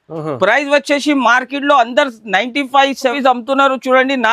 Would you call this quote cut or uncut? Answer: cut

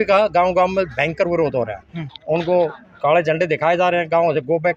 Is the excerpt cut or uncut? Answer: uncut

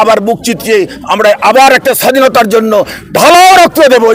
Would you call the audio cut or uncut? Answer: uncut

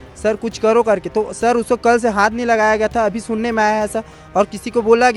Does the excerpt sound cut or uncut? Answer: uncut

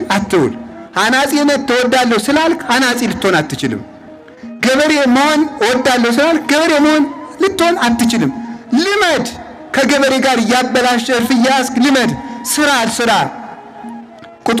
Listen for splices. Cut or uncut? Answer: uncut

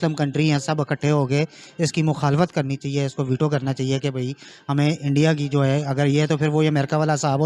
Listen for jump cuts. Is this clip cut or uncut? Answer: uncut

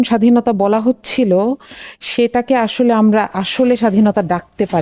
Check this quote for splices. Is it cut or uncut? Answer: uncut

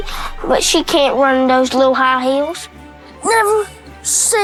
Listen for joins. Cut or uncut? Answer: uncut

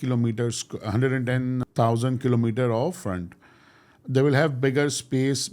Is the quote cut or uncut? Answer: cut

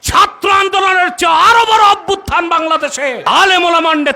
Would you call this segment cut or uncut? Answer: cut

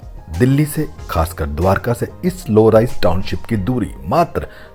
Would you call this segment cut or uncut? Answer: uncut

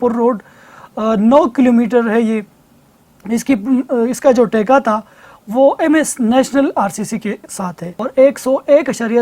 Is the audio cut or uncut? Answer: cut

